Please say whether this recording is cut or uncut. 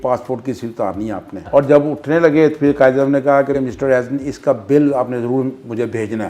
cut